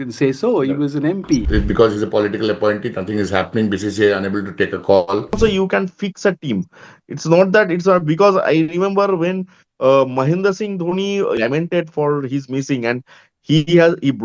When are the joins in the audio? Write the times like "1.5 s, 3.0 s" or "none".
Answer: 1.4 s, 5.4 s, 11.4 s